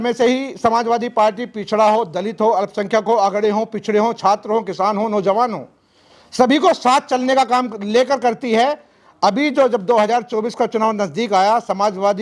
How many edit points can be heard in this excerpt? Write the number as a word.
zero